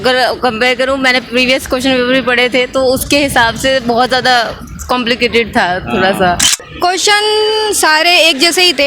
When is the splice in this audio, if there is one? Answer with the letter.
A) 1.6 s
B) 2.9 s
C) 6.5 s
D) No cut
C